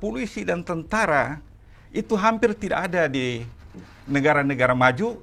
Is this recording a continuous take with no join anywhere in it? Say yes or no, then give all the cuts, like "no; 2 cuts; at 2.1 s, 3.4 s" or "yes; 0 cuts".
yes; 0 cuts